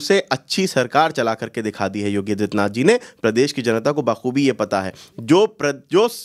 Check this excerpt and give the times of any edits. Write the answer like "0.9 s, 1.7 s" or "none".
none

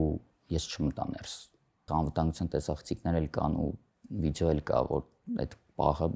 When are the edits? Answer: 1.9 s

